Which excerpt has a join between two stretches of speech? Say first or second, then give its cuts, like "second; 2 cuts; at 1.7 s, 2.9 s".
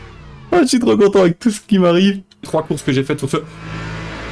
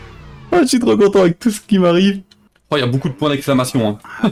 first; 1 cut; at 2.5 s